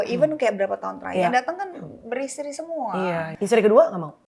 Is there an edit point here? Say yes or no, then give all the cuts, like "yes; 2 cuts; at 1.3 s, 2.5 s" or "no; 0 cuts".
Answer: yes; 1 cut; at 3.3 s